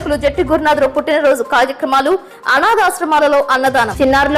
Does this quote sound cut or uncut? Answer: uncut